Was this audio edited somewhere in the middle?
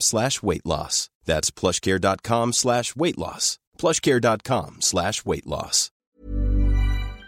yes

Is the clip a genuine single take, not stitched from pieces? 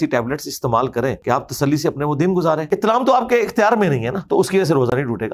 no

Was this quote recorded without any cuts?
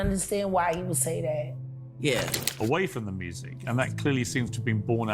no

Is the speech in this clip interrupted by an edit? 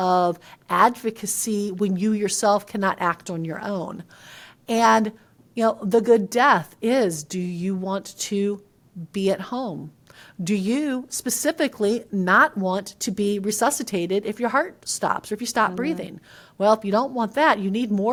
no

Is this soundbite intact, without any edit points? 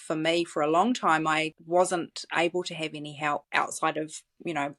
no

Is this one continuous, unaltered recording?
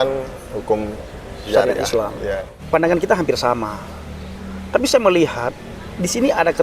no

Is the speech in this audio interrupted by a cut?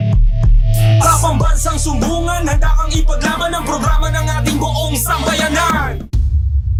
no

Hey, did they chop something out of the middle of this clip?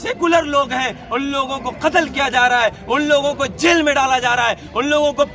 no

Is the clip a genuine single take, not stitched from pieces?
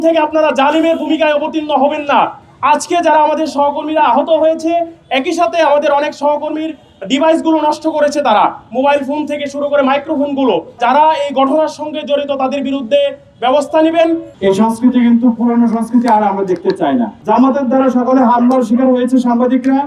yes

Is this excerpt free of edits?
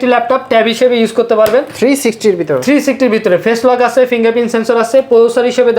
yes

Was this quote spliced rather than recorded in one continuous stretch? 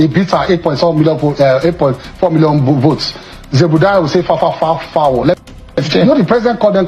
yes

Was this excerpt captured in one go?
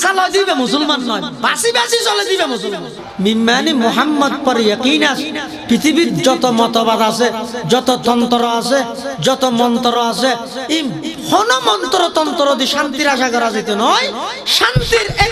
no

